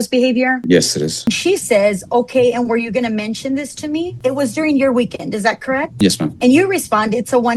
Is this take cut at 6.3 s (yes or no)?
yes